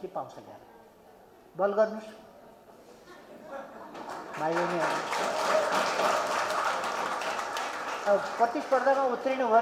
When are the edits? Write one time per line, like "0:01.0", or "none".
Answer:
none